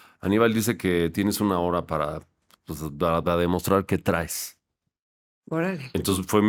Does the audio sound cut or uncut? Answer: uncut